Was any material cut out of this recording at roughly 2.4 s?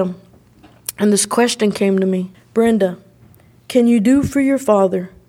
yes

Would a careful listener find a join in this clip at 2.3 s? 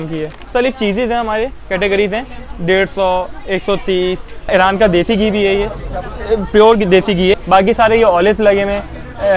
no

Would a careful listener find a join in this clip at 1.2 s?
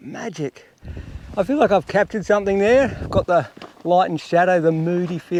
no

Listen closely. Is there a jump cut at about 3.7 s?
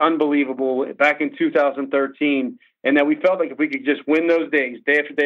no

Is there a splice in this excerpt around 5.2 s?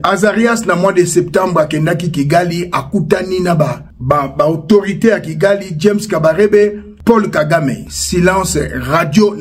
no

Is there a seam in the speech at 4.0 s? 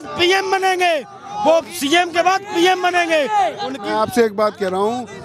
no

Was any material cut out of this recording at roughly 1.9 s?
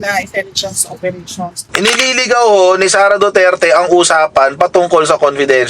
yes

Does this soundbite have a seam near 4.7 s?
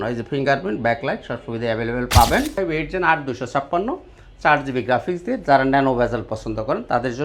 no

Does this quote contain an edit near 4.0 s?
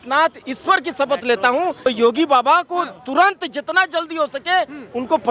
no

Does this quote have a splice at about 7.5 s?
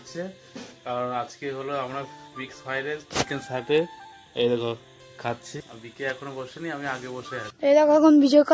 yes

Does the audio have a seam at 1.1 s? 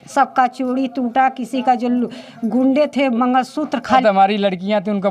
no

